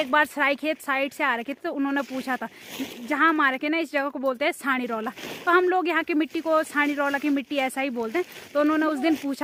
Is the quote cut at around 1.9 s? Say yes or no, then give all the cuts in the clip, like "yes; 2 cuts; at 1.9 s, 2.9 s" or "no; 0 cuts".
no; 0 cuts